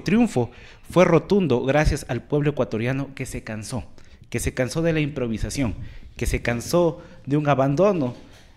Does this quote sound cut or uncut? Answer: uncut